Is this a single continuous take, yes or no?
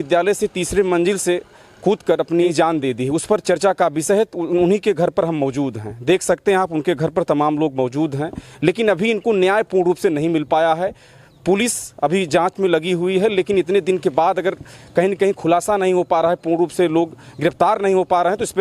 no